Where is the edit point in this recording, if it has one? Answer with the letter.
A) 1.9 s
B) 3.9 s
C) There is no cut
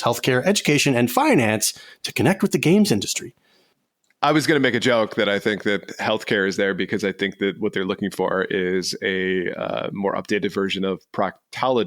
B